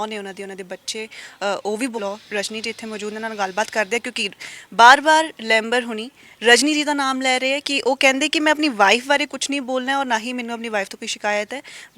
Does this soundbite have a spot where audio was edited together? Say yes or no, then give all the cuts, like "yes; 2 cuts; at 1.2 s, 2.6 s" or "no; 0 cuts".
yes; 1 cut; at 2.0 s